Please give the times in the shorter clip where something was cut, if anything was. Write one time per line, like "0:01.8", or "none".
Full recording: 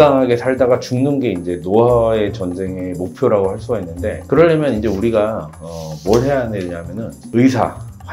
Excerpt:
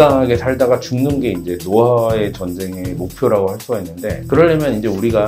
none